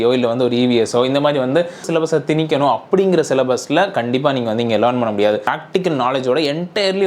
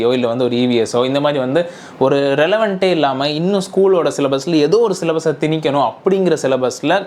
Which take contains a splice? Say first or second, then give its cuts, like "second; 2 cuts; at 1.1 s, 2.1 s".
first; 2 cuts; at 1.8 s, 5.5 s